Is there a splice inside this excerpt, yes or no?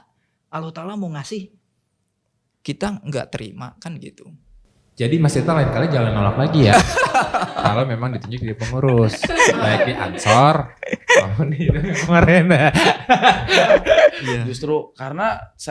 yes